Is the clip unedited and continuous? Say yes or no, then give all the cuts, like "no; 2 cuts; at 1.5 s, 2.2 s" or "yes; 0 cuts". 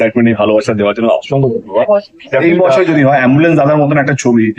no; 1 cut; at 2.4 s